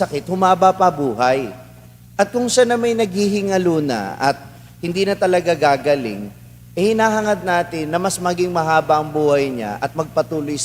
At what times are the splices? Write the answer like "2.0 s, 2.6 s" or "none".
none